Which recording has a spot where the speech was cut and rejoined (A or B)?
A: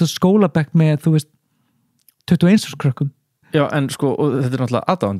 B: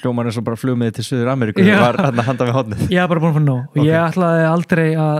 A